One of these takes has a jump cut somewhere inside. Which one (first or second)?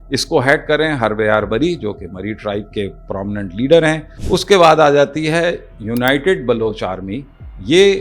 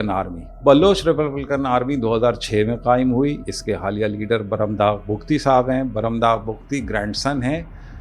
first